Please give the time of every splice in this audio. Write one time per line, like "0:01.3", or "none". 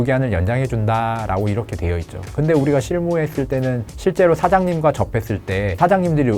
none